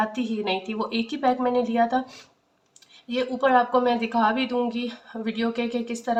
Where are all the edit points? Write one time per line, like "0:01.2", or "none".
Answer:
none